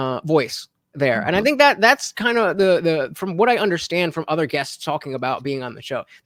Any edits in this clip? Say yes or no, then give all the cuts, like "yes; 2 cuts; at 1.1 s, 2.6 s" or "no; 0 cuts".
no; 0 cuts